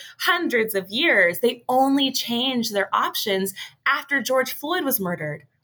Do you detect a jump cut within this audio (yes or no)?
no